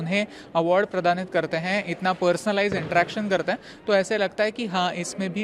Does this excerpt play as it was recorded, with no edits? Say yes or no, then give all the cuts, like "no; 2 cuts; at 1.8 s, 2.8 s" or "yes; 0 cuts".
yes; 0 cuts